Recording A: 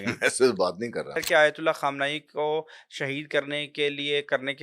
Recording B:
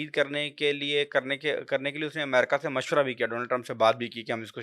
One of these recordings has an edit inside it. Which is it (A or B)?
A